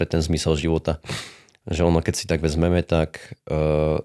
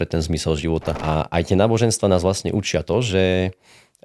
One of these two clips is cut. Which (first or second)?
second